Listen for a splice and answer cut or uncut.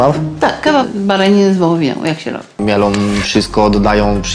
cut